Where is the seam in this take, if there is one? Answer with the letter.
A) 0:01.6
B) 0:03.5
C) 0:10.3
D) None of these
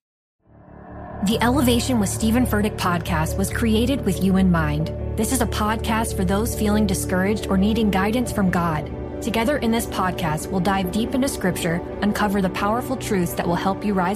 D